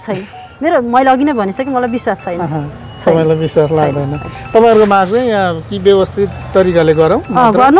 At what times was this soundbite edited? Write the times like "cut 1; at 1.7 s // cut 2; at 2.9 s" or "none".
none